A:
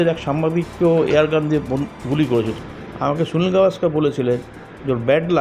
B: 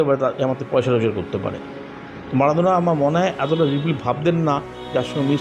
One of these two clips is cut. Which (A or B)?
A